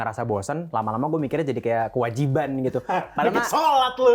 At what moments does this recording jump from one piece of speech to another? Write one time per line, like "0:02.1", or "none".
none